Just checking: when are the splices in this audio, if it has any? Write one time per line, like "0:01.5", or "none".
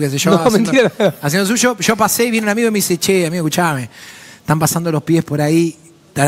none